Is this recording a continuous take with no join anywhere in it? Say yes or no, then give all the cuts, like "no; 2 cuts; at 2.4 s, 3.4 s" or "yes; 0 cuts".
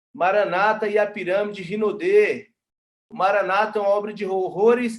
no; 1 cut; at 3.0 s